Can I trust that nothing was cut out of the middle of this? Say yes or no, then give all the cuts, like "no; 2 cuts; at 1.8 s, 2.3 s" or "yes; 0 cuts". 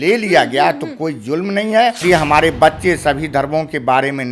no; 1 cut; at 2.0 s